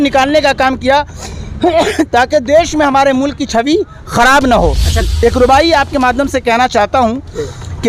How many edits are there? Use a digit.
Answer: 1